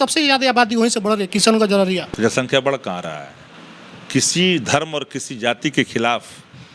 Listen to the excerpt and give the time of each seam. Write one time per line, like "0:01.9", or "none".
0:02.1